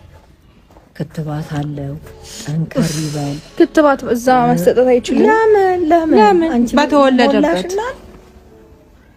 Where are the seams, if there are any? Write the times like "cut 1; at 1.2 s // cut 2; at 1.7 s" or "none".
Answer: none